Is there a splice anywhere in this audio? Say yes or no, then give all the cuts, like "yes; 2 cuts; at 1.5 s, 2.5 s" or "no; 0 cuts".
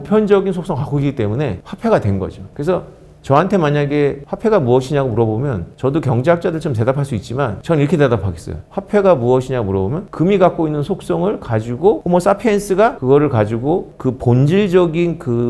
no; 0 cuts